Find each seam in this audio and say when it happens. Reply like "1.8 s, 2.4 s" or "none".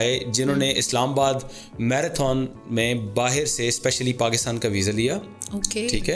none